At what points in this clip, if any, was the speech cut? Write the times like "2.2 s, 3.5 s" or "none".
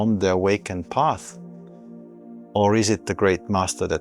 1.2 s, 2.5 s